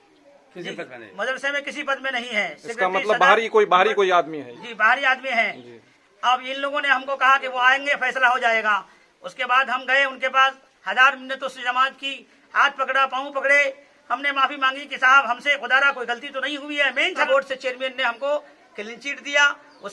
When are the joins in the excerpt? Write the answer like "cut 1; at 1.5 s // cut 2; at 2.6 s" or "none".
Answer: none